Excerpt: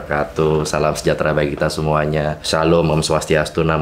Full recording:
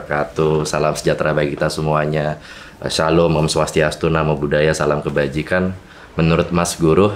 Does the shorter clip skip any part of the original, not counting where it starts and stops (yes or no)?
yes